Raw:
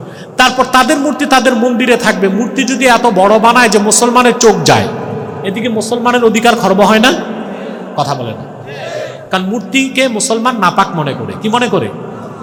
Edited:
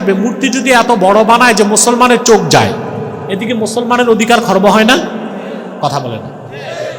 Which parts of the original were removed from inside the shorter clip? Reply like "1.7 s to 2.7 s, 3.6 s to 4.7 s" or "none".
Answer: none